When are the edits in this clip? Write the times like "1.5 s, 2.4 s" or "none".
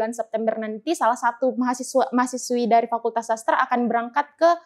none